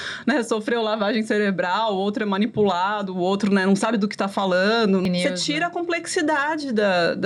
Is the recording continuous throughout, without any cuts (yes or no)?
no